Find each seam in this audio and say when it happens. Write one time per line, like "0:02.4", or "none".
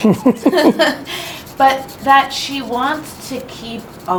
none